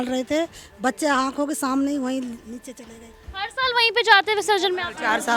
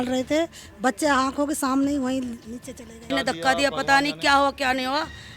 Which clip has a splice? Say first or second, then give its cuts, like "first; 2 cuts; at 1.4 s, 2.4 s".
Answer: second; 1 cut; at 3.0 s